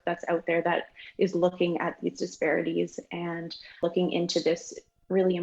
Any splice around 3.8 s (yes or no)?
yes